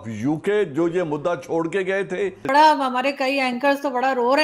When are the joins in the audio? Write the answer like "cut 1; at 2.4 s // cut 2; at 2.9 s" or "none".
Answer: none